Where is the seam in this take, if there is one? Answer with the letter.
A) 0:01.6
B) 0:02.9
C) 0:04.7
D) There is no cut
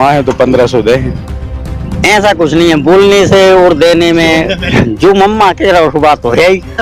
C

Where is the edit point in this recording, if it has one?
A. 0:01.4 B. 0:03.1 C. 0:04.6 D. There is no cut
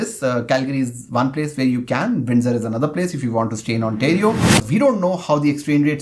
C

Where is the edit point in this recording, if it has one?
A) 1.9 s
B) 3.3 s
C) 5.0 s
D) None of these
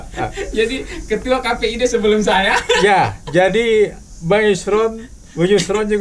D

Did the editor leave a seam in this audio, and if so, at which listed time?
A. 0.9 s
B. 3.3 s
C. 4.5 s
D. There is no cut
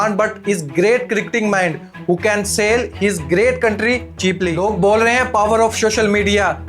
C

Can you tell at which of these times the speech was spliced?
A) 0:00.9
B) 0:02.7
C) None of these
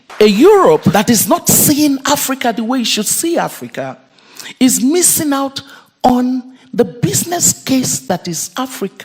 A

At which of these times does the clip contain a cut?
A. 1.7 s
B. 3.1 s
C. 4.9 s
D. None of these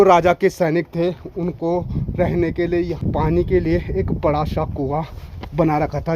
B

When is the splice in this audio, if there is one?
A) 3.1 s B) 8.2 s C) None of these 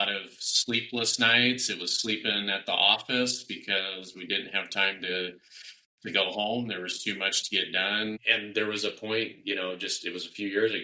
B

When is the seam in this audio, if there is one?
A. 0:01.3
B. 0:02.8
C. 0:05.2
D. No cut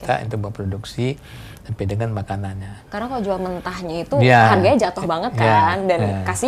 B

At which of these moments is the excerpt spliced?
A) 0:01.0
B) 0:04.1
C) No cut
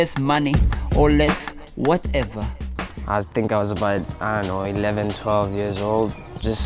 B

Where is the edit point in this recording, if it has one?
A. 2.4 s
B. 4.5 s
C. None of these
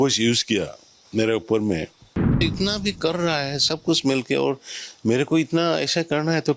A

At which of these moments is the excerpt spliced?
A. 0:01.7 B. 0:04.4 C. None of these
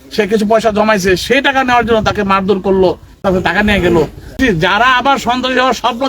B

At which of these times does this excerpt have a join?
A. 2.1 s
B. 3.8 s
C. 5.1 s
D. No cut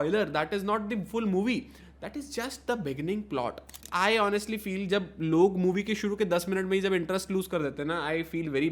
B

